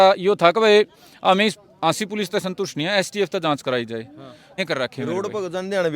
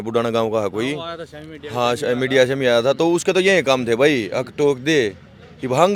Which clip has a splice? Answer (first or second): first